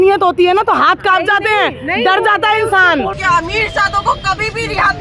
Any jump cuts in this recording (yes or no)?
yes